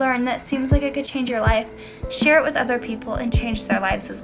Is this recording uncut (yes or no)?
yes